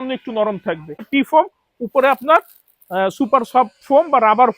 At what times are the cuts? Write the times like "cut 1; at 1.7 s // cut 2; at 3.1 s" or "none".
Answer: cut 1; at 1.1 s